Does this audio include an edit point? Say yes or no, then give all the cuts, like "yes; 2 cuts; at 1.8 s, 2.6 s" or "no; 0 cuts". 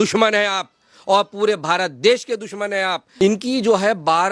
yes; 1 cut; at 3.0 s